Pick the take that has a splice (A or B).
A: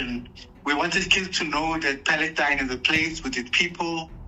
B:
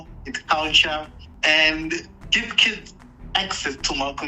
B